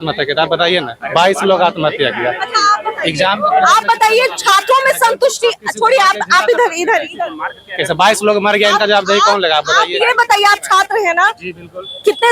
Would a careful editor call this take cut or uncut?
uncut